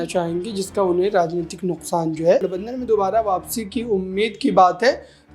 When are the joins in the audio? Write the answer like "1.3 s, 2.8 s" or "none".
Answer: 2.4 s

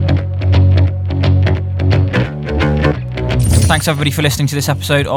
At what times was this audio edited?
3.7 s

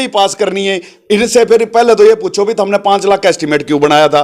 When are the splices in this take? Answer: none

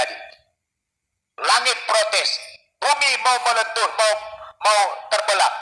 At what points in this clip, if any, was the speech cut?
none

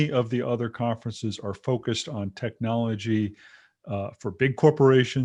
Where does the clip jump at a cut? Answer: none

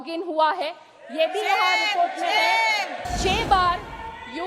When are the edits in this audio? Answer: 3.0 s

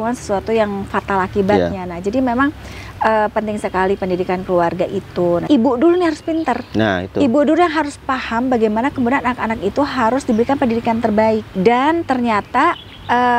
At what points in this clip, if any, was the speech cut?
5.4 s, 11.5 s

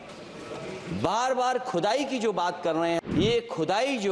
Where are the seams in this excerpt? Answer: 3.0 s

